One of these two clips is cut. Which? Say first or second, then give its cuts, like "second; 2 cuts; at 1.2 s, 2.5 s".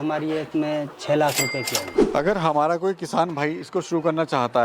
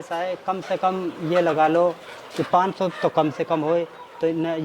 first; 1 cut; at 1.9 s